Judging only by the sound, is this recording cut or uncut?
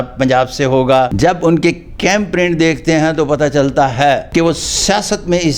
cut